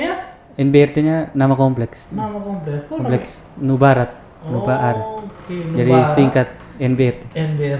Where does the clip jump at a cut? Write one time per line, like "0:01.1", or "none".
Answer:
none